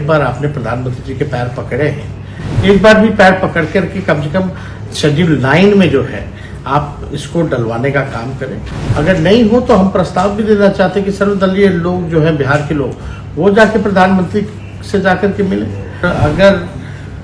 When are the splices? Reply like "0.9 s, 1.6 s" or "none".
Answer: 16.0 s